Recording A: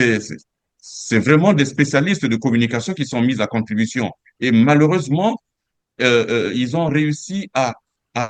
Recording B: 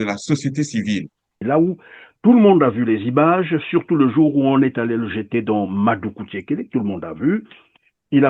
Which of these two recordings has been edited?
B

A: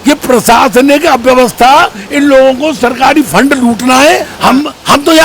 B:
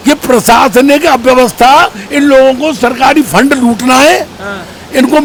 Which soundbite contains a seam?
A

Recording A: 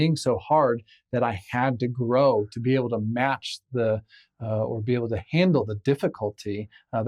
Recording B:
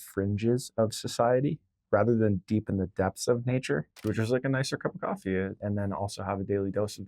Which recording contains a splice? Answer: B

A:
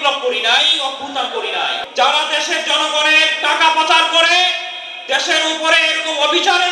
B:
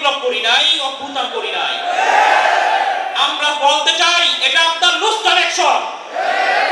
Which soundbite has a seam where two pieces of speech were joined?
A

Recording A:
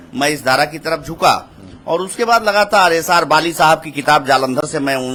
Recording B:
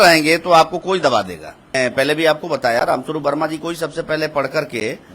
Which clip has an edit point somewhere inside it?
B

